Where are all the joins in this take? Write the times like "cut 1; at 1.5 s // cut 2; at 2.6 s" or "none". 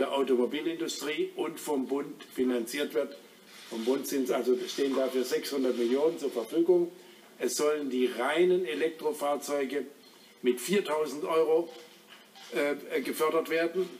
cut 1; at 11.0 s